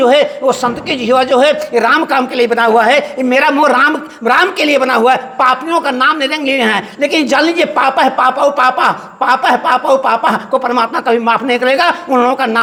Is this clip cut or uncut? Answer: uncut